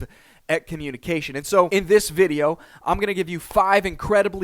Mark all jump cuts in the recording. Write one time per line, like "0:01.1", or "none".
0:01.7